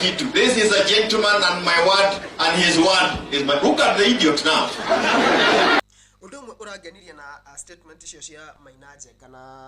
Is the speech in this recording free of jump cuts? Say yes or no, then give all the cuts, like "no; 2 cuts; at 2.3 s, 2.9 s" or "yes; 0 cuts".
no; 1 cut; at 5.8 s